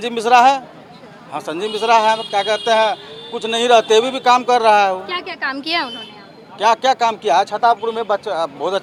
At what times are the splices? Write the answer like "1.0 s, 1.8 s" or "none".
none